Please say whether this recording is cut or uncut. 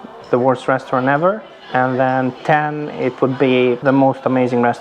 cut